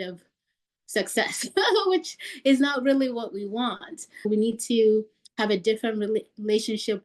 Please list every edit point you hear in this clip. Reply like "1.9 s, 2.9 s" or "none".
4.3 s